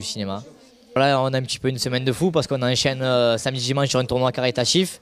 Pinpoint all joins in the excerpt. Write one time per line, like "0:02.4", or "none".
0:04.1